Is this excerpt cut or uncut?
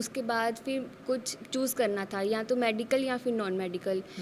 uncut